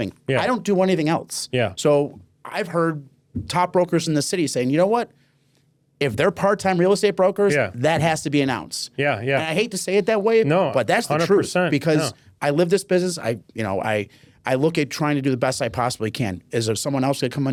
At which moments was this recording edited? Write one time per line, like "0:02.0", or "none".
none